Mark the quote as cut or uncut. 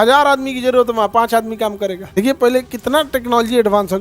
cut